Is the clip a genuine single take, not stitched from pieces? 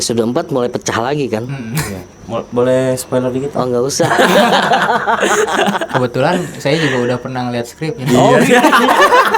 yes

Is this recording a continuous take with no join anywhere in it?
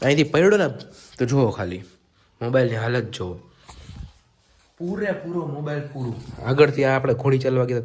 yes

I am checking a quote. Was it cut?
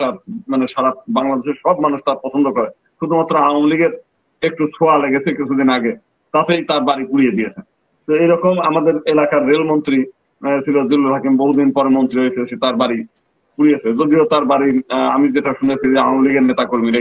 no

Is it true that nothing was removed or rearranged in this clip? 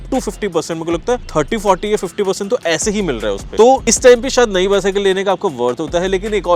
yes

